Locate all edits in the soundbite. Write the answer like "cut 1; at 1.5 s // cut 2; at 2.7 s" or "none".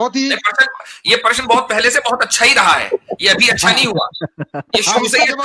none